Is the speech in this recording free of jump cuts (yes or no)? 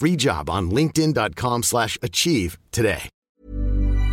no